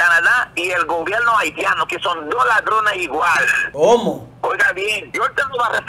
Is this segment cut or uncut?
cut